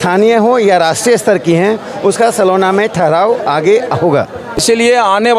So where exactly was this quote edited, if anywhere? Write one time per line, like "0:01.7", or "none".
0:04.5